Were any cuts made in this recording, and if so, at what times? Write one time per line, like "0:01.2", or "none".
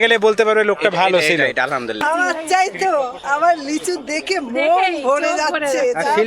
0:01.9